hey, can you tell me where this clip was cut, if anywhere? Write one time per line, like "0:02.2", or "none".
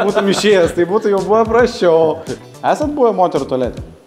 0:02.3